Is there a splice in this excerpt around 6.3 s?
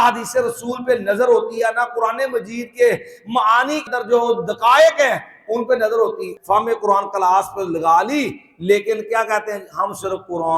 yes; 2 cuts; at 3.8 s, 6.3 s

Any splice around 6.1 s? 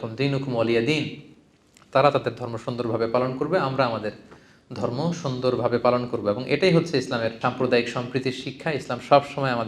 no; 1 cut; at 7.4 s

